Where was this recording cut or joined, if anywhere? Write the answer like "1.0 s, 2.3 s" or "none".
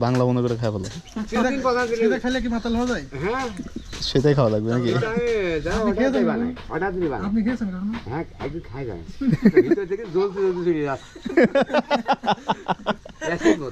none

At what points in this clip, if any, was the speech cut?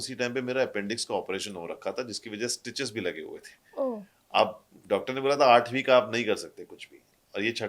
none

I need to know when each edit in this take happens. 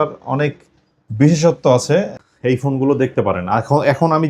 2.1 s

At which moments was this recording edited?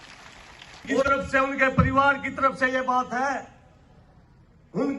1.0 s

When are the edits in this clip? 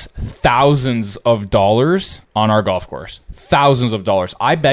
2.2 s

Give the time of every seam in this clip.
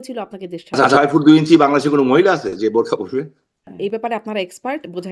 1.0 s, 3.7 s

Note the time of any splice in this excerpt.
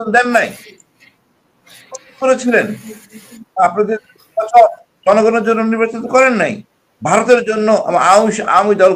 none

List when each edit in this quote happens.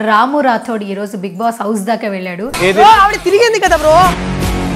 2.5 s

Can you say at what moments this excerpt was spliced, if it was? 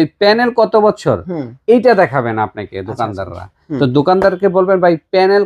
none

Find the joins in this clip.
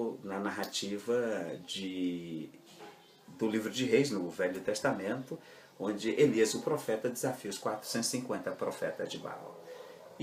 2.9 s

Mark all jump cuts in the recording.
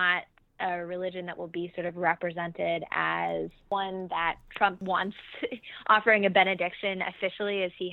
3.6 s, 4.8 s

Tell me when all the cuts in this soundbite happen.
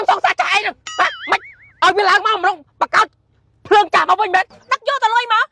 4.5 s

